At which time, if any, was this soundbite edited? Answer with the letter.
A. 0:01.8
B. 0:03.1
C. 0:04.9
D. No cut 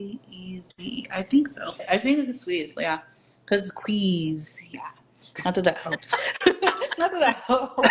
A